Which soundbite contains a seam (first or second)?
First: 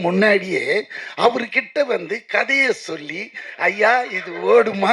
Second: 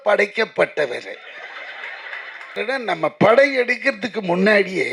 second